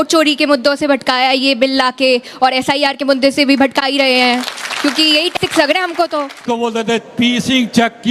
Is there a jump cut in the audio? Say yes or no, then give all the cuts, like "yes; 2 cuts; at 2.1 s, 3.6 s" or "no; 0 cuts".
yes; 1 cut; at 6.4 s